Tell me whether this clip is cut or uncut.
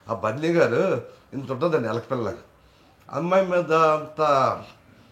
uncut